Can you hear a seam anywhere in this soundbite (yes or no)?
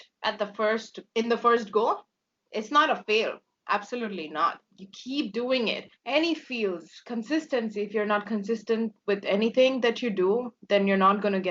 yes